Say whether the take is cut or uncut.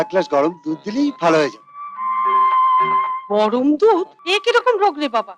cut